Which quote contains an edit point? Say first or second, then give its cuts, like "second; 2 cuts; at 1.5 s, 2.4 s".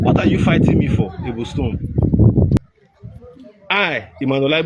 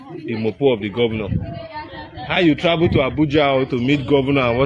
first; 1 cut; at 2.6 s